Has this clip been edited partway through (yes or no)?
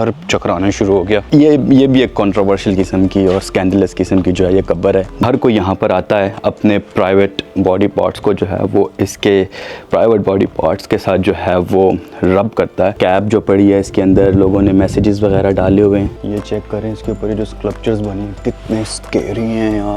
yes